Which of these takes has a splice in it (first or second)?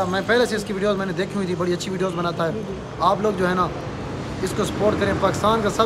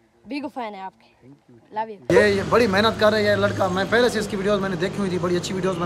second